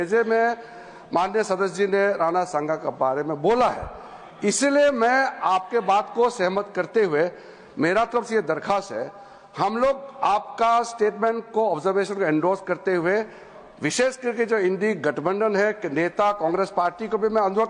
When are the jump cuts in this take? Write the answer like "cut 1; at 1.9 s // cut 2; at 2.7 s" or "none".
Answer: none

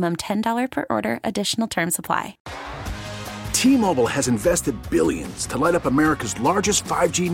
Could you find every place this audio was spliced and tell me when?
cut 1; at 2.4 s

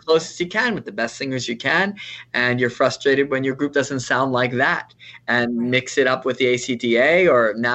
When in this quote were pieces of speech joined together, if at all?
none

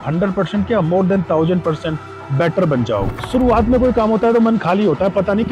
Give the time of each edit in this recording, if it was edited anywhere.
cut 1; at 3.1 s

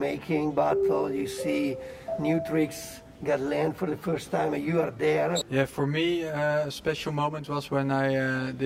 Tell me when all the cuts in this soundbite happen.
cut 1; at 5.4 s

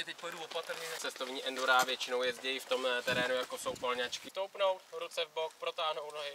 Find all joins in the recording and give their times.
cut 1; at 1.0 s // cut 2; at 4.2 s

